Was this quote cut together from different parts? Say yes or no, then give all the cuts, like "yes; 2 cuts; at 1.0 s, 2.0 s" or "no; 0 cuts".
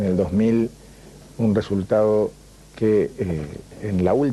no; 0 cuts